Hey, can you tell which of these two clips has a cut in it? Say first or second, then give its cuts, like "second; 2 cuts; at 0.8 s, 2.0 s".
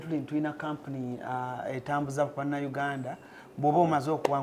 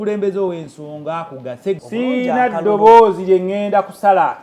second; 1 cut; at 1.8 s